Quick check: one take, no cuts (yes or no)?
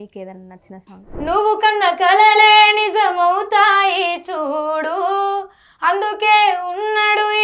no